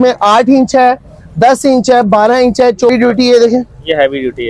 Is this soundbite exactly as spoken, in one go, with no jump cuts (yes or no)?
no